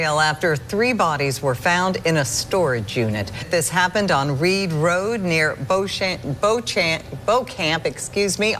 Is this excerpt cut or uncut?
cut